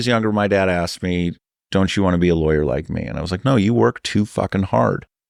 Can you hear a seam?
no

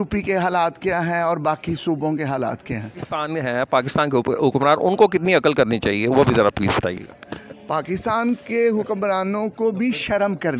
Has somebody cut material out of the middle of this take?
yes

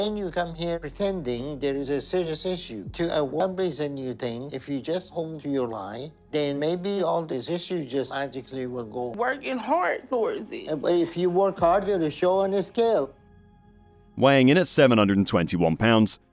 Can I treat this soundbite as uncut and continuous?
yes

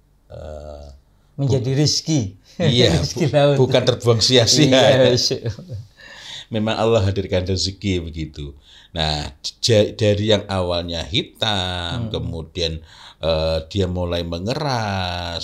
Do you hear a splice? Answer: no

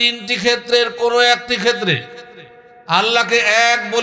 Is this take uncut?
yes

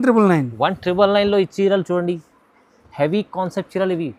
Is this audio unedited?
yes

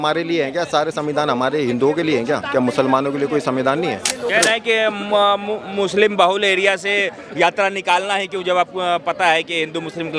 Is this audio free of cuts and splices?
no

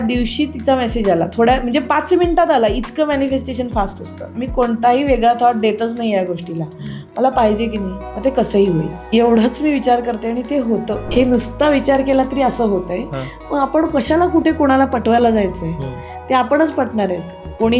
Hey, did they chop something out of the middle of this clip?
yes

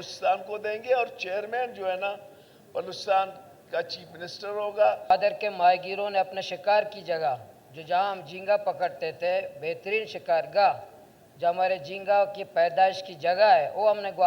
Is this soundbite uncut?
no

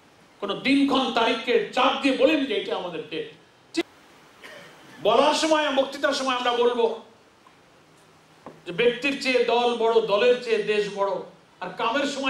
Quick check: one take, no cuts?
no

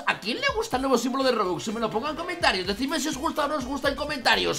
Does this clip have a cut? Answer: no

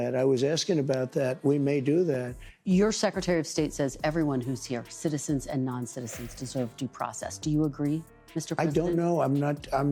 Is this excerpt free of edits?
yes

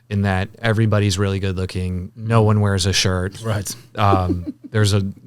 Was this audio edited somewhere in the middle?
no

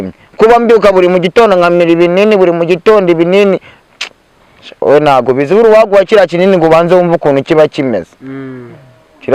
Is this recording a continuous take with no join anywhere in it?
yes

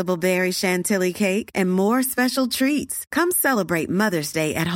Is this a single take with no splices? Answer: yes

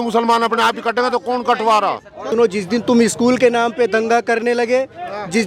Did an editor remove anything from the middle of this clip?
yes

